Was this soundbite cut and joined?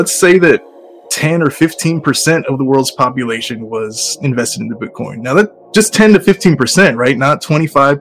no; 0 cuts

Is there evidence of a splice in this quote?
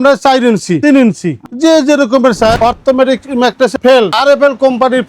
yes; 2 cuts; at 2.5 s, 3.8 s

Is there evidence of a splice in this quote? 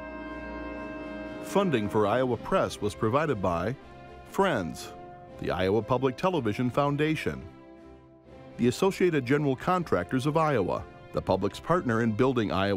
yes; 1 cut; at 1.5 s

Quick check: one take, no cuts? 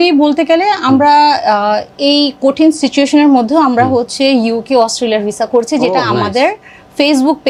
yes; 0 cuts

